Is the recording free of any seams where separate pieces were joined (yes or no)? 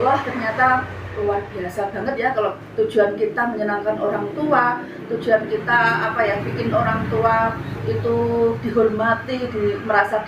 yes